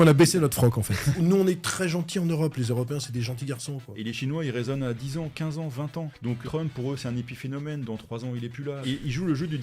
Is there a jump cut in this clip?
yes; 4 cuts; at 1.1 s, 3.9 s, 6.3 s, 8.8 s

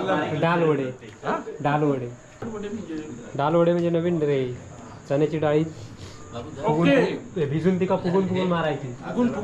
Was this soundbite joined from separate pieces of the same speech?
yes; 1 cut; at 2.4 s

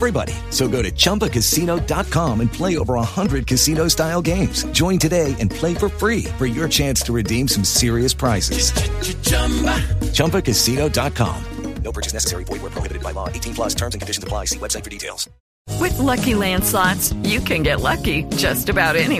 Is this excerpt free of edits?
no; 1 cut; at 15.6 s

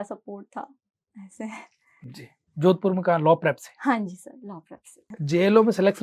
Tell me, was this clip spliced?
no; 0 cuts

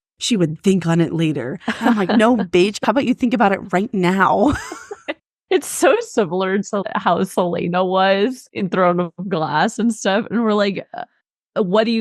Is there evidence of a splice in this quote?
yes; 2 cuts; at 6.8 s, 8.4 s

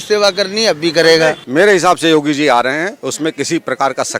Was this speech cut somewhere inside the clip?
yes; 1 cut; at 1.4 s

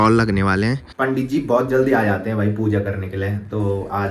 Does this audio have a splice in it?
yes; 1 cut; at 0.9 s

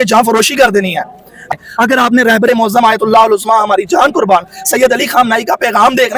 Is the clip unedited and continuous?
no; 1 cut; at 1.4 s

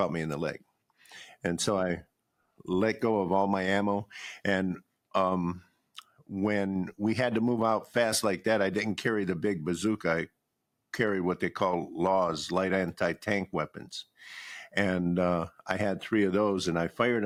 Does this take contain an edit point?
no; 0 cuts

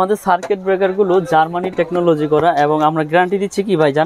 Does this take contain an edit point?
no; 0 cuts

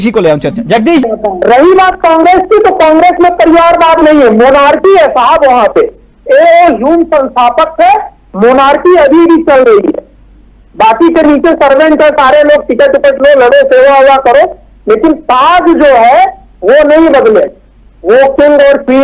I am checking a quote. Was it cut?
yes; 1 cut; at 1.0 s

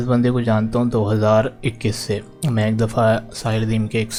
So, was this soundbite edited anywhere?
no; 0 cuts

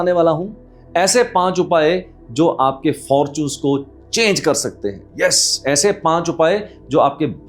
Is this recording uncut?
yes; 0 cuts

